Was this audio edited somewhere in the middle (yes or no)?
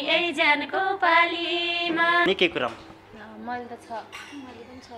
yes